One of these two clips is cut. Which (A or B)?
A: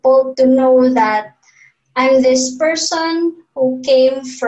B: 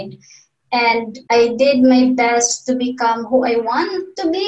B